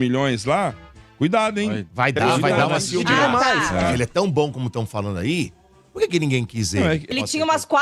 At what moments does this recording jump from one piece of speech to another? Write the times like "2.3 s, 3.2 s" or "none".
3.8 s, 7.1 s